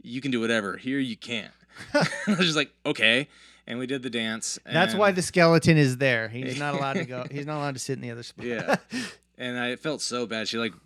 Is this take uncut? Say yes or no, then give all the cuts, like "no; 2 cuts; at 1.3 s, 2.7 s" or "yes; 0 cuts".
yes; 0 cuts